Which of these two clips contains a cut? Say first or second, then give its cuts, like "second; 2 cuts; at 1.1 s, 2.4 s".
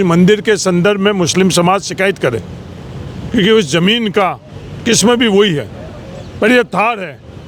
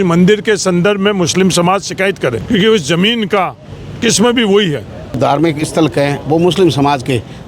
second; 2 cuts; at 2.4 s, 5.2 s